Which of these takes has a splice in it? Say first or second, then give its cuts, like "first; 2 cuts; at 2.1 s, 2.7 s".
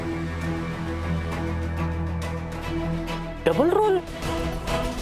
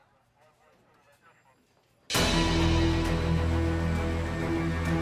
first; 2 cuts; at 2.7 s, 4.3 s